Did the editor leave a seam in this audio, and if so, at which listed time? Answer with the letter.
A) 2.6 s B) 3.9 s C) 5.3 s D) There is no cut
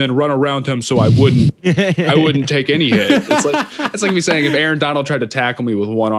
B